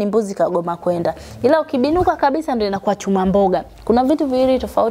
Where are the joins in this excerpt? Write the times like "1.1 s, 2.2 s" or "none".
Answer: none